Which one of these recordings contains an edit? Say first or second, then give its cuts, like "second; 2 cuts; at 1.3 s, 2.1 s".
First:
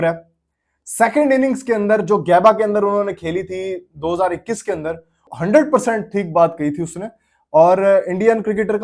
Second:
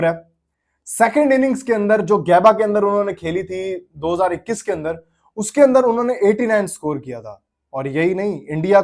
first; 1 cut; at 5.2 s